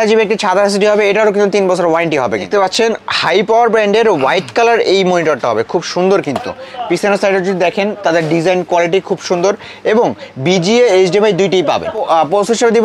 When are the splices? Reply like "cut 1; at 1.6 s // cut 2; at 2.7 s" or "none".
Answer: cut 1; at 2.5 s // cut 2; at 12.0 s